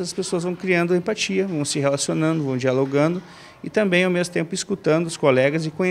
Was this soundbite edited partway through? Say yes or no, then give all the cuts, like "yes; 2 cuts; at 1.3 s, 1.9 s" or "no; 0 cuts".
no; 0 cuts